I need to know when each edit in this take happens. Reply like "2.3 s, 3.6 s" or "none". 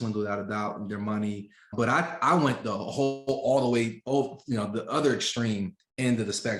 1.7 s